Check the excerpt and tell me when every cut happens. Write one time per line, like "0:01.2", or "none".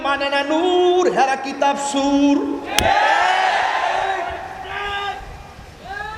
none